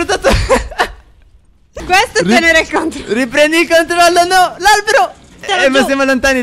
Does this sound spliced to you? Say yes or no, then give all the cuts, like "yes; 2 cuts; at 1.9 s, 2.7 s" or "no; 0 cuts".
yes; 2 cuts; at 1.8 s, 5.5 s